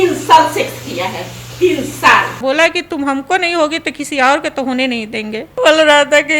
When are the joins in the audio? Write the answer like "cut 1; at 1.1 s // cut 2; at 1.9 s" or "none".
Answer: cut 1; at 2.4 s // cut 2; at 5.5 s